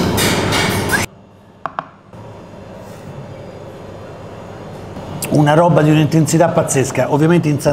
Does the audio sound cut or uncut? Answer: cut